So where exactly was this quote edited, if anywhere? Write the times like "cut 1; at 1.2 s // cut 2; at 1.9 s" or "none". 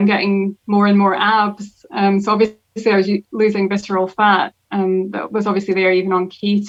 none